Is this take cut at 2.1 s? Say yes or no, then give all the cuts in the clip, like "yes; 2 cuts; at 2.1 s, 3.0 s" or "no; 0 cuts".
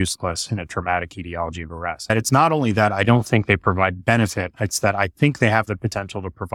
yes; 1 cut; at 2.1 s